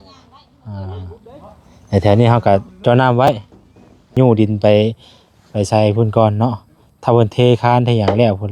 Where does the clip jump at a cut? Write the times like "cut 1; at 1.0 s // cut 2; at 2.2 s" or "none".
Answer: cut 1; at 4.2 s